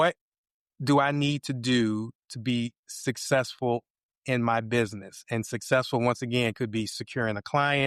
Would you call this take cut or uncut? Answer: uncut